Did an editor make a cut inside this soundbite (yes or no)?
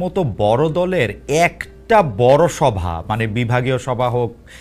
no